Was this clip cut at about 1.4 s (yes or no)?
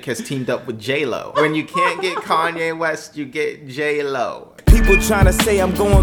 yes